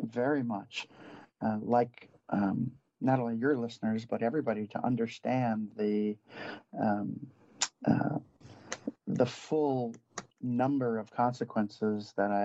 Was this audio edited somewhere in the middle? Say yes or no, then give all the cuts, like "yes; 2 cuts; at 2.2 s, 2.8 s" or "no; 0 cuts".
no; 0 cuts